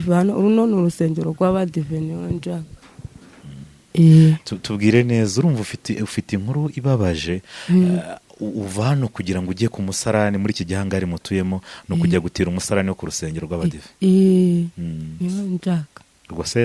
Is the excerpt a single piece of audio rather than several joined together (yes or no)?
yes